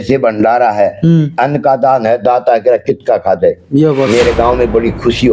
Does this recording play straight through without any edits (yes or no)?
yes